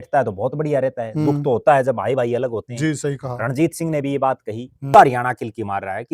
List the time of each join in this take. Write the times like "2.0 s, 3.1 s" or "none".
4.9 s